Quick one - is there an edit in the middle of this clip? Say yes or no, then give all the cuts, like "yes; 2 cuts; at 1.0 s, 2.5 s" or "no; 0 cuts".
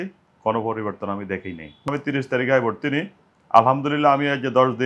yes; 1 cut; at 1.9 s